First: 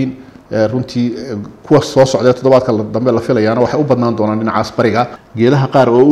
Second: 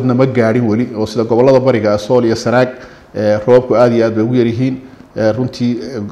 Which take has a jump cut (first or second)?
first